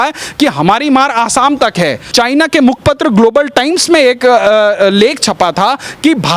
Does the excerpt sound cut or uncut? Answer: cut